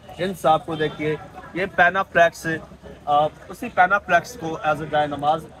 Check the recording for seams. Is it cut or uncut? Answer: uncut